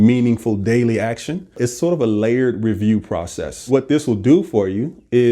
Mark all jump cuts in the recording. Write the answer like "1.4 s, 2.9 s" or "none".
1.6 s, 3.7 s